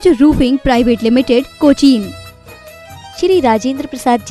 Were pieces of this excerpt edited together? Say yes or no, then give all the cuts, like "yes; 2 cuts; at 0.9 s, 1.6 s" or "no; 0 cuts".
no; 0 cuts